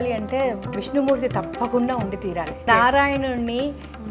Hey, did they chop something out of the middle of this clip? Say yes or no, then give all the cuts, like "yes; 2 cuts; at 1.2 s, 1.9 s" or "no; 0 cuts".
yes; 1 cut; at 2.6 s